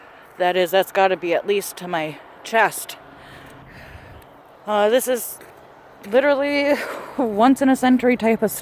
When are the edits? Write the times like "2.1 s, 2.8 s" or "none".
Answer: 3.7 s